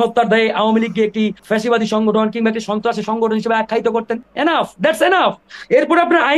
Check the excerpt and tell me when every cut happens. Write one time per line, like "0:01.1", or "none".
0:01.4
0:04.2
0:05.5